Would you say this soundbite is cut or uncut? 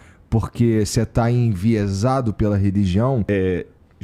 uncut